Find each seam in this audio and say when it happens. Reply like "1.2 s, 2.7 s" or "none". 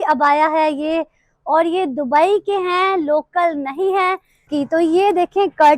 4.5 s

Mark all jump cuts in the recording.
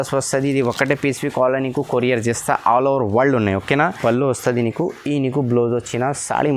4.0 s

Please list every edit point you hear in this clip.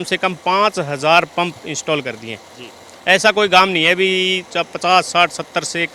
none

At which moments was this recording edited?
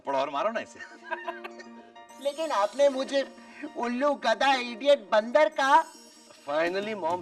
none

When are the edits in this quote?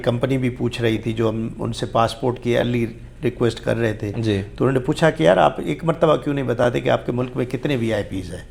none

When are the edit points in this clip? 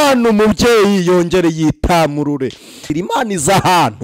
2.9 s

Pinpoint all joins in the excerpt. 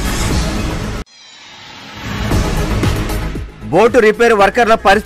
0.9 s

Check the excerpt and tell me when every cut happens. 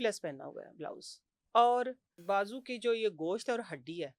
2.2 s

